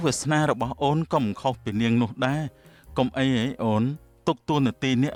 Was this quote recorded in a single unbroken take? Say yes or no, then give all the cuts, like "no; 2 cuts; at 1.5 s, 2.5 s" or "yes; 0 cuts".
yes; 0 cuts